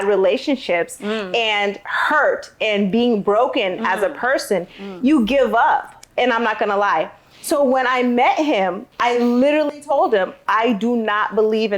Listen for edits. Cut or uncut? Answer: cut